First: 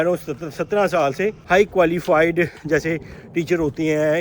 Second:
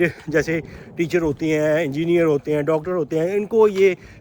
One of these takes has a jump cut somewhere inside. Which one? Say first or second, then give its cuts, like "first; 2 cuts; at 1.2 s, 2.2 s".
first; 1 cut; at 1.4 s